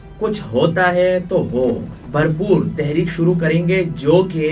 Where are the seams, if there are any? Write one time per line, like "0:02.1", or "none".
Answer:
0:01.9